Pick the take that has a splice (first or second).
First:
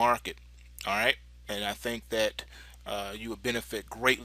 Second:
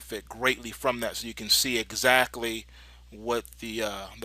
first